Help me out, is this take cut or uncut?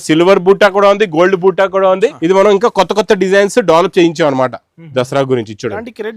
cut